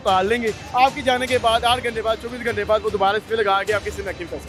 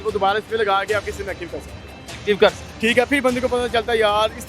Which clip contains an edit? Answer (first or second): second